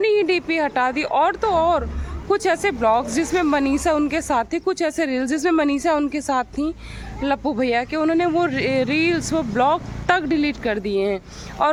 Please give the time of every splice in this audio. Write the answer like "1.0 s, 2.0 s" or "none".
none